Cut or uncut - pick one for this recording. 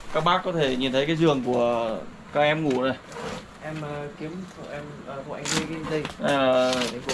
uncut